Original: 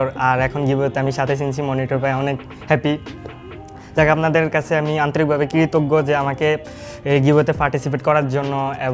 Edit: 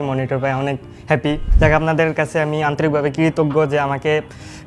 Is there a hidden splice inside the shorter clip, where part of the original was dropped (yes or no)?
yes